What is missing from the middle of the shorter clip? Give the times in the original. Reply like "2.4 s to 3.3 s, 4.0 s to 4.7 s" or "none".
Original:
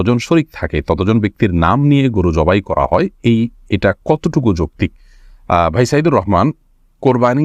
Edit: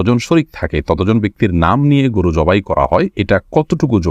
3.1 s to 3.7 s